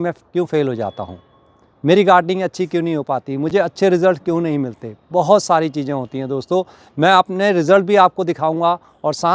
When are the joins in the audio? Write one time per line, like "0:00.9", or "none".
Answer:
none